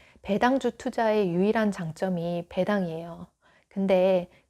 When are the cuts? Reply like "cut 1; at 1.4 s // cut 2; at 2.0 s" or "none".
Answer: none